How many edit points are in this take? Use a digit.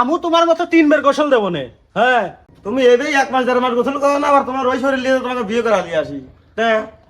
1